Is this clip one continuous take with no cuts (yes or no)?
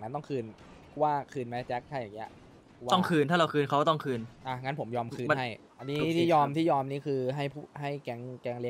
no